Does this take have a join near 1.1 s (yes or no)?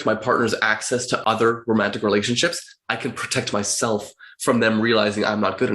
yes